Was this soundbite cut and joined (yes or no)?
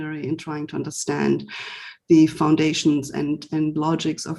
no